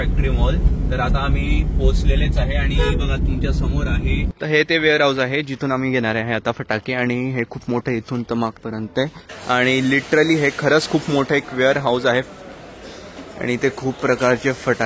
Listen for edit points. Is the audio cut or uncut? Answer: cut